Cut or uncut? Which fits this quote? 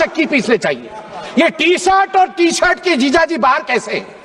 uncut